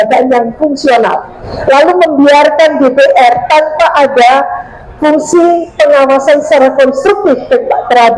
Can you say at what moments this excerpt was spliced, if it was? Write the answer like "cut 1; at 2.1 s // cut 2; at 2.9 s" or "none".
cut 1; at 1.5 s